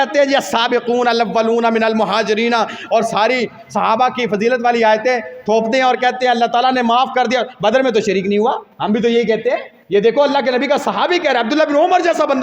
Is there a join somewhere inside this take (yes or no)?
yes